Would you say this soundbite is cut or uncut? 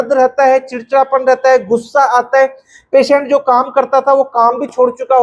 uncut